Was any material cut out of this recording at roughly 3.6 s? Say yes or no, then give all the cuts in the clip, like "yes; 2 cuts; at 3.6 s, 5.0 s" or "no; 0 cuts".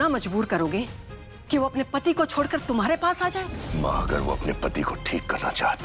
yes; 1 cut; at 3.6 s